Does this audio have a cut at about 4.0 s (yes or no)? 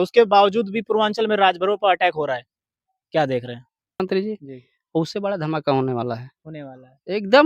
yes